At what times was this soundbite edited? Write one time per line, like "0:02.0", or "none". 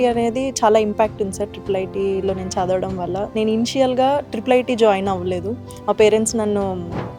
none